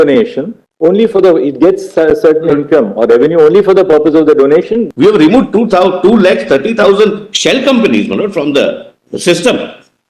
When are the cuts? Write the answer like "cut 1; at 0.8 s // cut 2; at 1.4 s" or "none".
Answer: cut 1; at 4.8 s